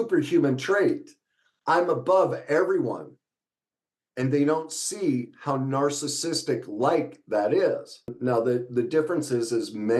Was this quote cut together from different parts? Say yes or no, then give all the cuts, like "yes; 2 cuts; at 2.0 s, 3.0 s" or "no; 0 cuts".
yes; 1 cut; at 8.1 s